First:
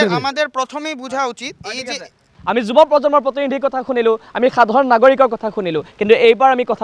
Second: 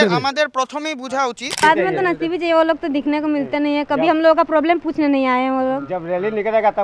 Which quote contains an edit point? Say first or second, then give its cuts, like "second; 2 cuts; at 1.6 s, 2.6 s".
second; 1 cut; at 1.6 s